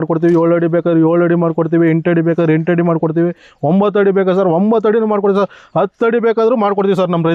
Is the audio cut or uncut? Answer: uncut